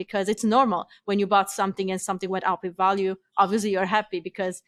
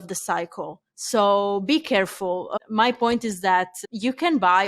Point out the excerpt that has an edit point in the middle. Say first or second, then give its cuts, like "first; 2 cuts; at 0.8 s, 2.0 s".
second; 2 cuts; at 2.5 s, 3.8 s